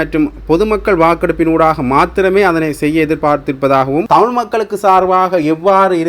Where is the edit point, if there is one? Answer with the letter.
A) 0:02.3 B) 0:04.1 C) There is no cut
B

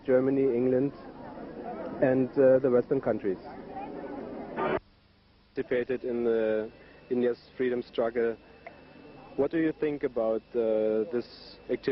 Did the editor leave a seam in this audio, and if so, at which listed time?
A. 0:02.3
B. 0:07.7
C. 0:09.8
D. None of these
B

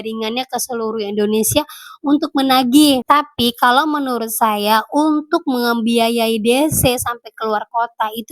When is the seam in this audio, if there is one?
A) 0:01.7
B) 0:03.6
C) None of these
C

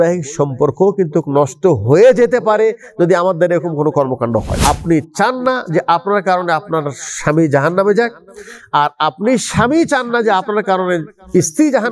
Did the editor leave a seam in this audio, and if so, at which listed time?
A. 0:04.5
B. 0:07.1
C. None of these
A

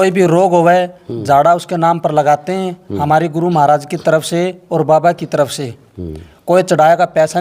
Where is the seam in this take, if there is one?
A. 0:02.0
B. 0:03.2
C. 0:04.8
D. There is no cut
A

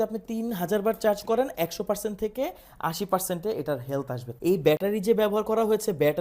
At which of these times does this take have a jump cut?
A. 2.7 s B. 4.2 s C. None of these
B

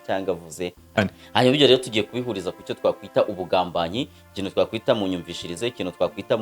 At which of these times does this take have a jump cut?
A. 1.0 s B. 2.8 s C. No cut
A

